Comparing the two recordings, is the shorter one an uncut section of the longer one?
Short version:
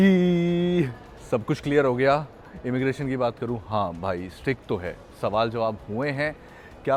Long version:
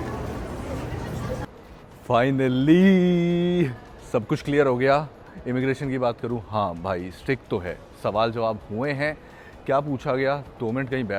yes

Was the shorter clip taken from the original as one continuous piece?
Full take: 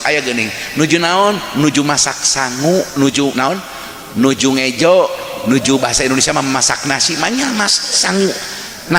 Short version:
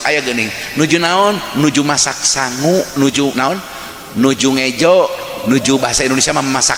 yes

